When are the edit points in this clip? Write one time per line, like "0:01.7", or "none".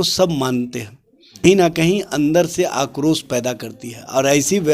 0:01.4